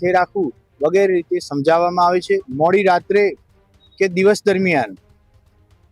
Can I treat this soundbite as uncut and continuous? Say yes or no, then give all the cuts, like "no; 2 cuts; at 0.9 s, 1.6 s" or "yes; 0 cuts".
no; 1 cut; at 2.5 s